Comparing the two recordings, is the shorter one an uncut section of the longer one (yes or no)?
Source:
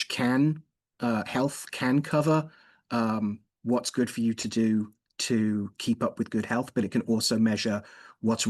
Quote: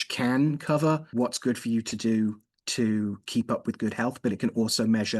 no